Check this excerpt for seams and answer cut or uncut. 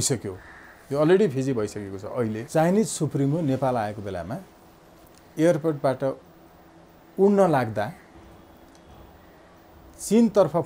cut